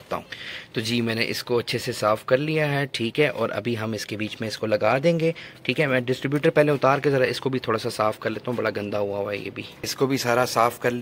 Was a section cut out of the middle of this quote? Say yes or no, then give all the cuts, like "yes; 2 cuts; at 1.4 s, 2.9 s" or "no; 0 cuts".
no; 0 cuts